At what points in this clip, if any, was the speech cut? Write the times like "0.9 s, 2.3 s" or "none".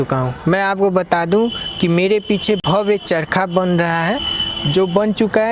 none